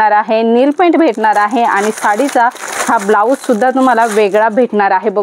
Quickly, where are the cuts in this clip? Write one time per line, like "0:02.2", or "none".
none